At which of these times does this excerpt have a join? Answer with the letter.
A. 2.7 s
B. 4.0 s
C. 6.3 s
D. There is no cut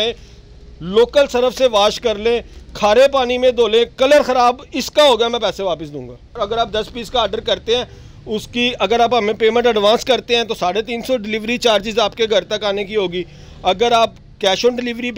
C